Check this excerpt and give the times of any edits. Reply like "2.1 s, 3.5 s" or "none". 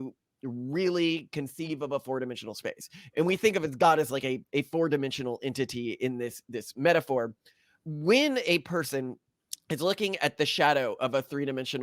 7.4 s